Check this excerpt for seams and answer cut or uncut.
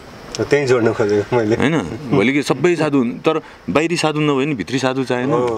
uncut